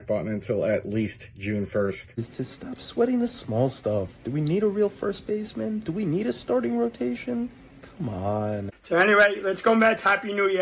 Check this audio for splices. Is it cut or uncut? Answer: cut